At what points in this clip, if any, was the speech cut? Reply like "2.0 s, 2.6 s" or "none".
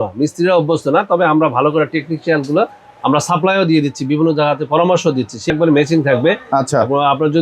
5.5 s